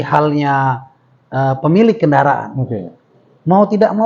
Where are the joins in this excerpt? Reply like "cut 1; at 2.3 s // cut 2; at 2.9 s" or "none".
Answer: none

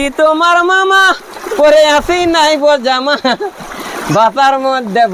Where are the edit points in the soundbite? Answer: none

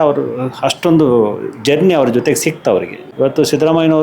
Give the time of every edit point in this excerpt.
cut 1; at 3.0 s

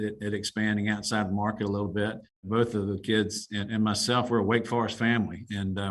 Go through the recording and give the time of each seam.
cut 1; at 2.4 s

